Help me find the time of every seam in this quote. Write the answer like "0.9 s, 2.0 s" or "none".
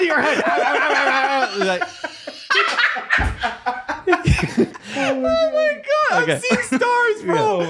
4.8 s